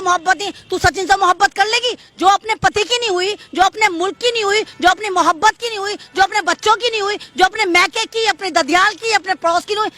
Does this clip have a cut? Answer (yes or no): no